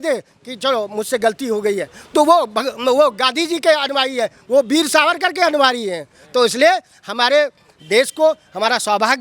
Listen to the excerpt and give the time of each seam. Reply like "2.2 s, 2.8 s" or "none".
none